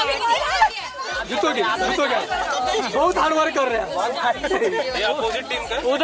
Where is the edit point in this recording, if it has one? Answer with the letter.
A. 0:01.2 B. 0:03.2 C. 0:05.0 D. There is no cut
A